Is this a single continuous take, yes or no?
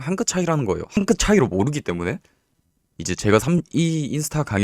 no